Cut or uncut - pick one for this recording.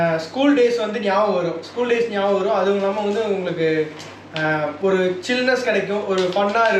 uncut